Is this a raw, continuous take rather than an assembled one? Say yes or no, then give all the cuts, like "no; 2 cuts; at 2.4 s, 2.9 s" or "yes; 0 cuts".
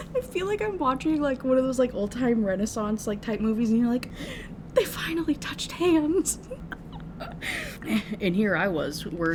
yes; 0 cuts